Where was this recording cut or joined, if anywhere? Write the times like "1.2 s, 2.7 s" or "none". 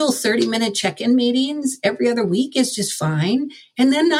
none